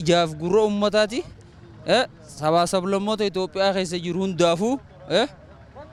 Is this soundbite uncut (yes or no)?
yes